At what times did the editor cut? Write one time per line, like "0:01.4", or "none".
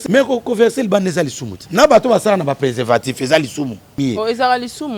0:01.6
0:04.0